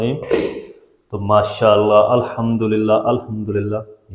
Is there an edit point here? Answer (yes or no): no